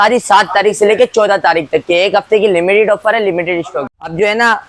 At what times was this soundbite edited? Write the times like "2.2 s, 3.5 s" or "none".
3.7 s